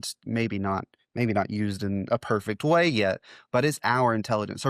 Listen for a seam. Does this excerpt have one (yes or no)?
no